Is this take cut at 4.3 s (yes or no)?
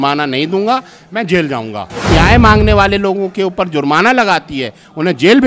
no